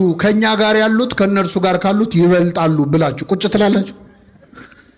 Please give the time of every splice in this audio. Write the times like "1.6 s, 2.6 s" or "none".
none